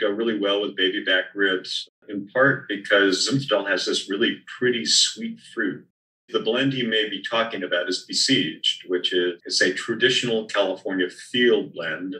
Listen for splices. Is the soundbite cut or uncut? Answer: cut